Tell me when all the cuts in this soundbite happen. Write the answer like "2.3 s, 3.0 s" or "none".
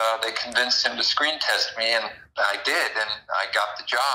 2.2 s